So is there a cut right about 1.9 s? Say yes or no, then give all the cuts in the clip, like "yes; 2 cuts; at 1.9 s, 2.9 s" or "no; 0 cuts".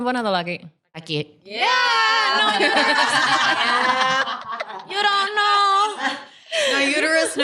no; 0 cuts